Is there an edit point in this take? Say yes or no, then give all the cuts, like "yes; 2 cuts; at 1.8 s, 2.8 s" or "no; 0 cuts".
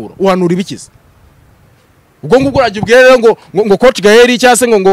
no; 0 cuts